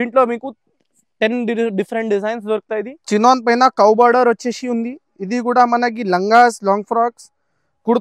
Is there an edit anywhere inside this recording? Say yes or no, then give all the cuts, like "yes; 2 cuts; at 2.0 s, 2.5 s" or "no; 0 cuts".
yes; 1 cut; at 3.0 s